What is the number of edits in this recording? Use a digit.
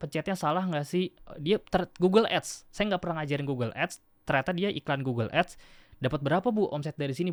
0